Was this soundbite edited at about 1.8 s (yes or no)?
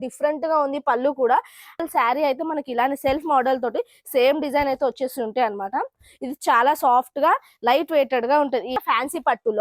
yes